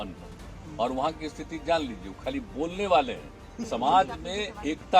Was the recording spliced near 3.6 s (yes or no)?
yes